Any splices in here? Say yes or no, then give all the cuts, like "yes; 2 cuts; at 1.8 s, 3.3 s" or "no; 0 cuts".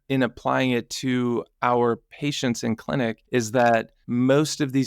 yes; 2 cuts; at 3.2 s, 4.0 s